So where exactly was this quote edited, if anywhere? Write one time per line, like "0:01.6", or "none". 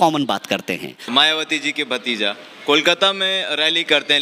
0:00.9